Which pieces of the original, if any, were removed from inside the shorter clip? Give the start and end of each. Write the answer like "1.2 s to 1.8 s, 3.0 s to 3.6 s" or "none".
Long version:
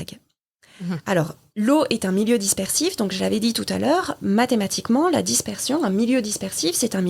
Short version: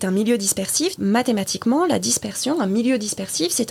2.9 s to 4.2 s